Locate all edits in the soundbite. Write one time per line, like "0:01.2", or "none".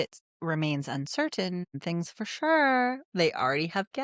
0:01.8